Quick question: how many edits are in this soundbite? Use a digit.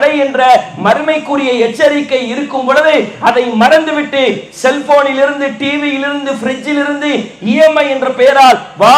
0